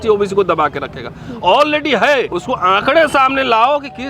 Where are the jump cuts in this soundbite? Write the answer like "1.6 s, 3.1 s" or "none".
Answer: 2.4 s